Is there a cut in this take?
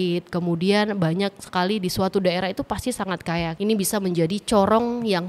yes; 1 cut; at 3.5 s

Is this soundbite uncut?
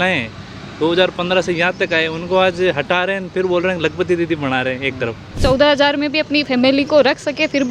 no; 1 cut; at 5.4 s

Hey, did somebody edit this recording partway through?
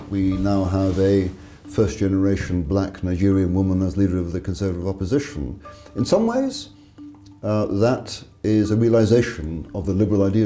no; 0 cuts

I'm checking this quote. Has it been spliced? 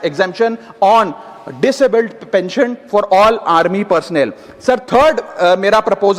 no; 0 cuts

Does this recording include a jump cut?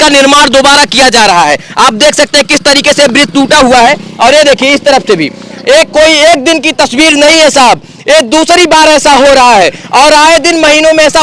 no; 0 cuts

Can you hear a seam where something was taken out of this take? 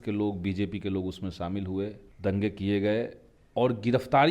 yes; 1 cut; at 2.1 s

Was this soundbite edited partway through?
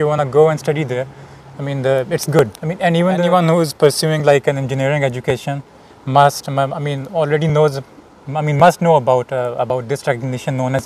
yes; 1 cut; at 3.2 s

